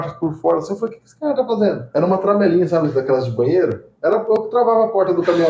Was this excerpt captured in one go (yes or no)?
yes